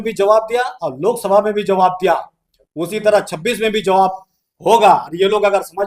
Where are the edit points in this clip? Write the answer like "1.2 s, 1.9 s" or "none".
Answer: none